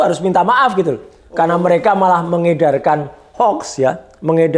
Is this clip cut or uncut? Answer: uncut